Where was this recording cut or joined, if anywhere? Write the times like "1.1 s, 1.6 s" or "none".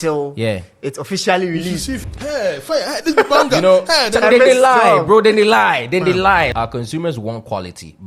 2.1 s, 6.5 s